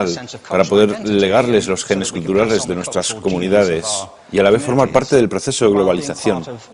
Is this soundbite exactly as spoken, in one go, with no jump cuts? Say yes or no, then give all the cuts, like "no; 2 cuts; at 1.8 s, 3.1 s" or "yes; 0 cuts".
no; 1 cut; at 4.9 s